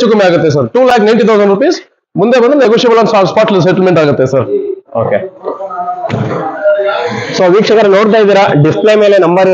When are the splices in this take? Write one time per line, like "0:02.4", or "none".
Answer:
none

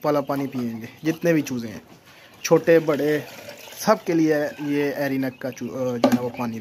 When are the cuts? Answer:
none

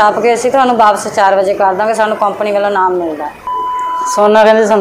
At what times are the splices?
0:03.4

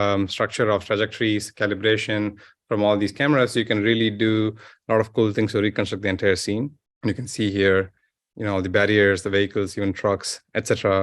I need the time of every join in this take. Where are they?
0:06.8

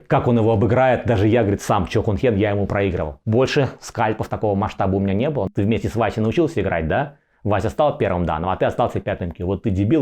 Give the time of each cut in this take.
0:03.2
0:05.5

